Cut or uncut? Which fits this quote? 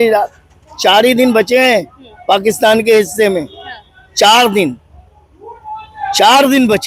uncut